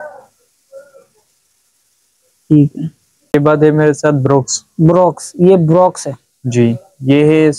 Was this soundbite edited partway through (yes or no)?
yes